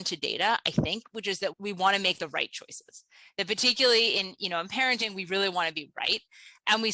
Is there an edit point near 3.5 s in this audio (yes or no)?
no